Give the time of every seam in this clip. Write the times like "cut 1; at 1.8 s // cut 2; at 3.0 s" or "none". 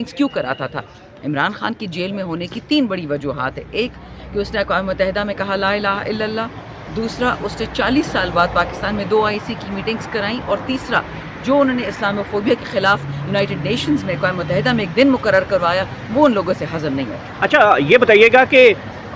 none